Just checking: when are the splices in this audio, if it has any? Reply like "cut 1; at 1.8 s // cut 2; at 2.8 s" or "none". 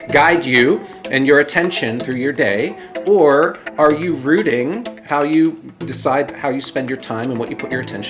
cut 1; at 6.3 s